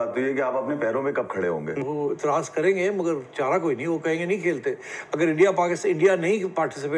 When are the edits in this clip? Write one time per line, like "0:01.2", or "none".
0:01.8